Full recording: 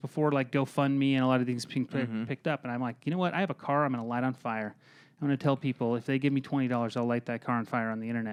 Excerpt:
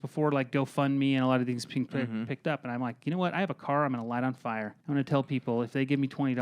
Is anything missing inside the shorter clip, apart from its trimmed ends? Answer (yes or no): yes